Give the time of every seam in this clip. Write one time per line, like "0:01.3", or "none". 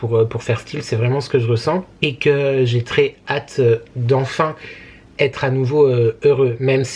none